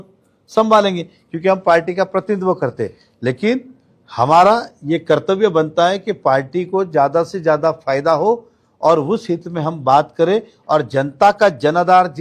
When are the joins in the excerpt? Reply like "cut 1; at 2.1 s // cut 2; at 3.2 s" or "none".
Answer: none